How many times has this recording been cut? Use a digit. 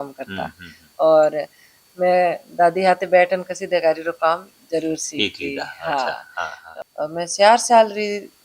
1